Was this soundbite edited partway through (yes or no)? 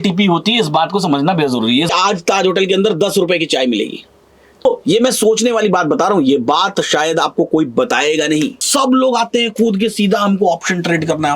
yes